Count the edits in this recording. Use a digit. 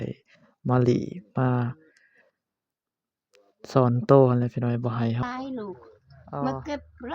1